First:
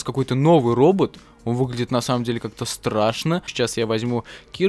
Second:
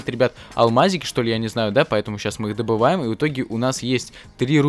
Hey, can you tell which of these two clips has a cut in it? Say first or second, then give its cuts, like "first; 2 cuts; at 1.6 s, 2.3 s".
first; 1 cut; at 3.5 s